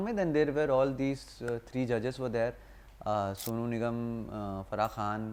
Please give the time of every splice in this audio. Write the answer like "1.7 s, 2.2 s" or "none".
none